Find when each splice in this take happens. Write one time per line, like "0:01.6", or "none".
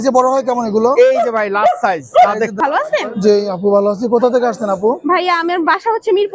0:02.6

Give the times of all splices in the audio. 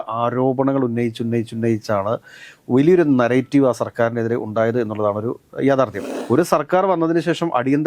0:06.1

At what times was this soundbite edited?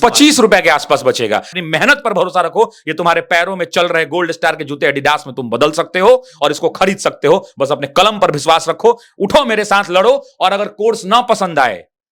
0:01.5

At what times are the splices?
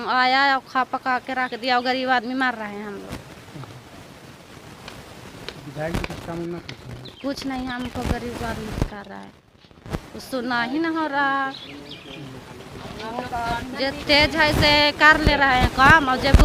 none

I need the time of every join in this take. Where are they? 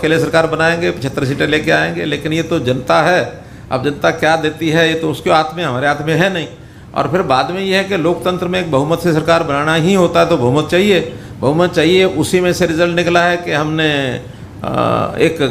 none

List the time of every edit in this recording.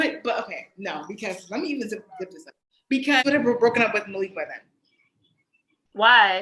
0:03.2

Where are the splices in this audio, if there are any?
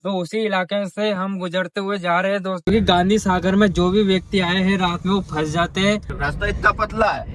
0:02.6
0:06.1

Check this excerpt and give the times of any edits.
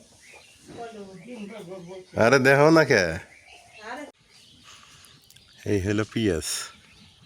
0:04.1

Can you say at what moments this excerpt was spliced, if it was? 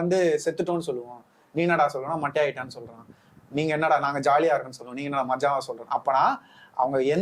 none

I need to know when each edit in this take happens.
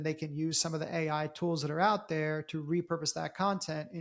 none

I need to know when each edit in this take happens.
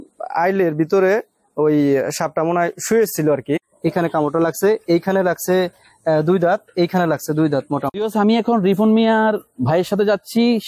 0:03.7
0:07.9

